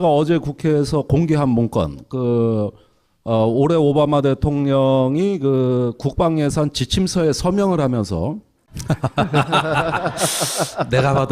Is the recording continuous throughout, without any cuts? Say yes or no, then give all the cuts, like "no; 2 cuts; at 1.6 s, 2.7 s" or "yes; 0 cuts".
no; 1 cut; at 7.7 s